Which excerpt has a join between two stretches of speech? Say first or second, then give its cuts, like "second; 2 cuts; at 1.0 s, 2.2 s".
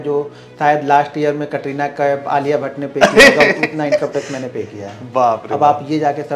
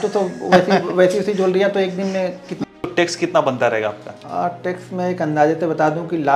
second; 2 cuts; at 2.6 s, 4.1 s